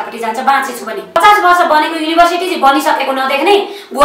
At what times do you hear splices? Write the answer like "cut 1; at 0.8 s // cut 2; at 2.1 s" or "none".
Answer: cut 1; at 1.2 s